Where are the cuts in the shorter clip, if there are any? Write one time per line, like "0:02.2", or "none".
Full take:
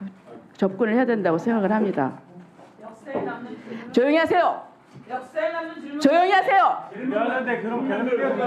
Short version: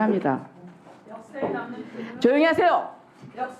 none